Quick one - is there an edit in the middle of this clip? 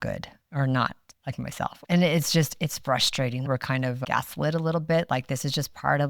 yes; 2 cuts; at 1.8 s, 3.5 s

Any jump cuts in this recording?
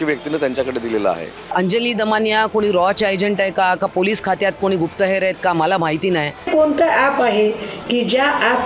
yes; 2 cuts; at 1.5 s, 6.5 s

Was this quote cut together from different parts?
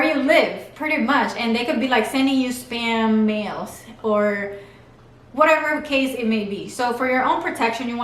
no; 0 cuts

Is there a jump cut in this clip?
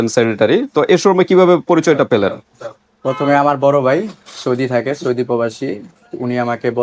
no; 0 cuts

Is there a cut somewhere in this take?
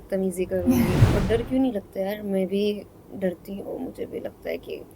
yes; 1 cut; at 1.0 s

